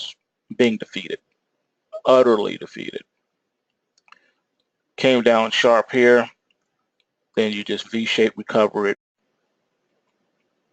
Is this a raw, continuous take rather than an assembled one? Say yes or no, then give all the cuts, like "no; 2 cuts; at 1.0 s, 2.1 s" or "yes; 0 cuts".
yes; 0 cuts